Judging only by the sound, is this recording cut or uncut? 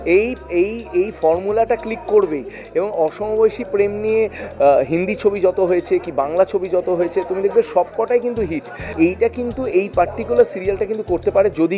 cut